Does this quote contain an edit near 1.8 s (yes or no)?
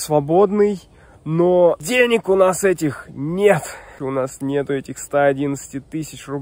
yes